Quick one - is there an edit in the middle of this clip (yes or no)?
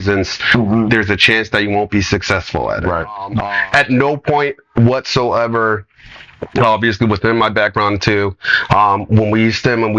yes